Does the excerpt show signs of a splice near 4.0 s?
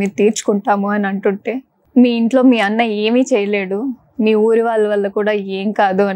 no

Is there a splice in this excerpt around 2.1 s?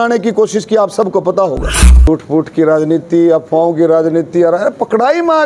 yes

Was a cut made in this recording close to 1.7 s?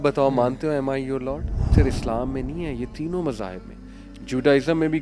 yes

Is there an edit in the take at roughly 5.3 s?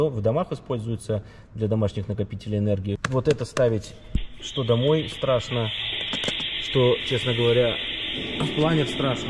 no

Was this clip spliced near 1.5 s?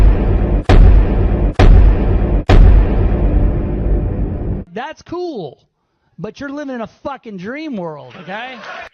no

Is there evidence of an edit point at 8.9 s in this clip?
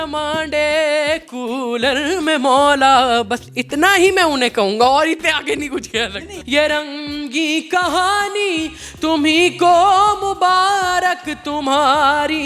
no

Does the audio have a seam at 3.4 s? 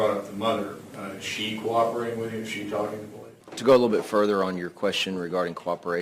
yes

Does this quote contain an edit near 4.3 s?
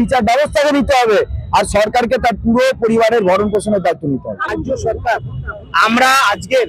yes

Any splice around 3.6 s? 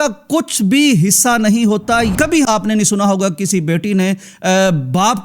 no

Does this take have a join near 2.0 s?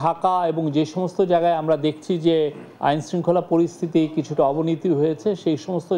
yes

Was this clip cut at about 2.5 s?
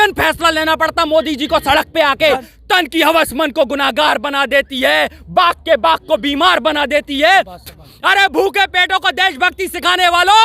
yes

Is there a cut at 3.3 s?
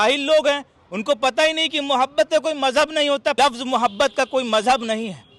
yes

